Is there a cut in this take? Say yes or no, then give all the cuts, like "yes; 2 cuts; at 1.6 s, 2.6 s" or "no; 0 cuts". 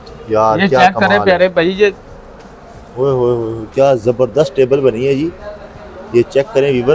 no; 0 cuts